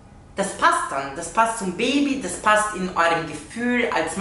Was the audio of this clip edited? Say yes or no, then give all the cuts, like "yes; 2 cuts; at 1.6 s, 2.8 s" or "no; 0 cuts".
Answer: no; 0 cuts